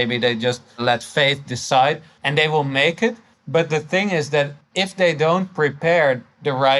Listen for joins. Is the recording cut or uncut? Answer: cut